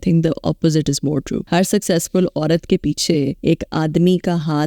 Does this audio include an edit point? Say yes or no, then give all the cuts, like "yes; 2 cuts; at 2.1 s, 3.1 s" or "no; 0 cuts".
yes; 2 cuts; at 1.4 s, 3.4 s